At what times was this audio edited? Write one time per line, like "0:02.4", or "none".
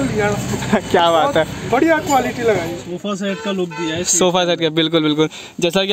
0:02.8